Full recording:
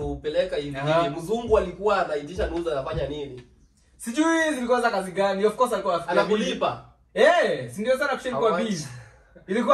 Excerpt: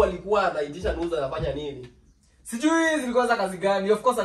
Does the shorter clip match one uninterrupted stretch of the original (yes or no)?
yes